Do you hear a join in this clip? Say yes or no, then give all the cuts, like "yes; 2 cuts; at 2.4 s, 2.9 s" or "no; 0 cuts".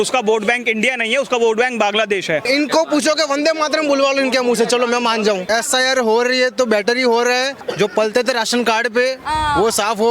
yes; 3 cuts; at 2.4 s, 5.5 s, 7.6 s